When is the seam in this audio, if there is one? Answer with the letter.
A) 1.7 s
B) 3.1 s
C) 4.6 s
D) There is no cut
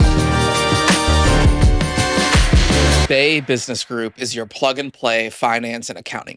B